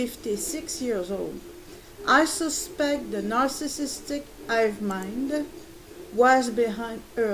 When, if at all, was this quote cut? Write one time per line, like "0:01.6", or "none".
none